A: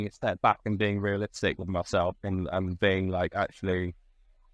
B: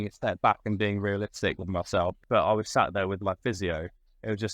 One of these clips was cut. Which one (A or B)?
B